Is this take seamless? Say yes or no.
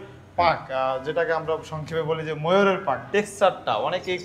no